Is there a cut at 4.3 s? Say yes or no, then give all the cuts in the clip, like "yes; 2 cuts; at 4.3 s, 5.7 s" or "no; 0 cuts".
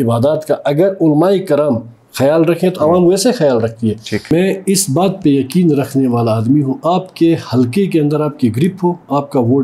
yes; 1 cut; at 4.3 s